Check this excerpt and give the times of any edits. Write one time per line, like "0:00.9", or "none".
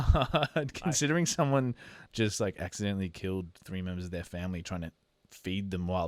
none